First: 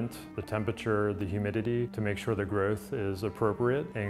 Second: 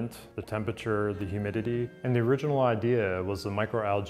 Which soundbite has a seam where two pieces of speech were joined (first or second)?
second